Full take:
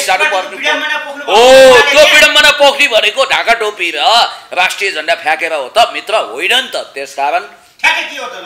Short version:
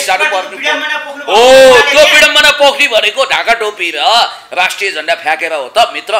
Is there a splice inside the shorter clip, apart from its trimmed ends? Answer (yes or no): no